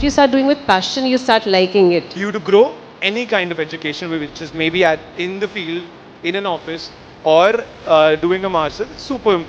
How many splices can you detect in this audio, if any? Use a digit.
1